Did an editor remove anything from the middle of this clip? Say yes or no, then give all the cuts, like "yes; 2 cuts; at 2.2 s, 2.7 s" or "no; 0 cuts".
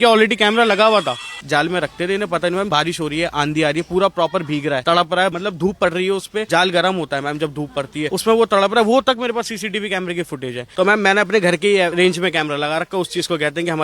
yes; 7 cuts; at 1.3 s, 2.7 s, 5.1 s, 6.5 s, 8.1 s, 10.6 s, 11.9 s